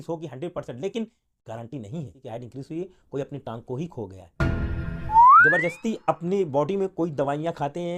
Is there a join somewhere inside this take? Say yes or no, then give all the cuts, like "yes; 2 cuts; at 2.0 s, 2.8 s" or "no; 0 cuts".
yes; 2 cuts; at 2.2 s, 5.2 s